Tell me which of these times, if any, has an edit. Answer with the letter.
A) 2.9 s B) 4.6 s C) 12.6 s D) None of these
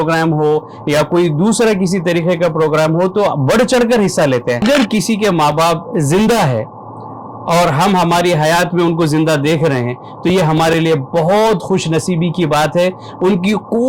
B